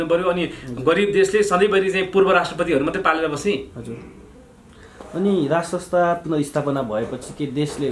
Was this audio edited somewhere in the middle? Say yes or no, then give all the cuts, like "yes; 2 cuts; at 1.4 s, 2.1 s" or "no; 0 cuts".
no; 0 cuts